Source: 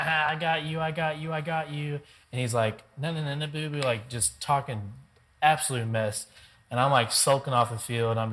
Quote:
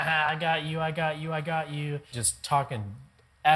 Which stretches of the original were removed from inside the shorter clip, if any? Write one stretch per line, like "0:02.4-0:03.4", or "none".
0:02.2-0:04.2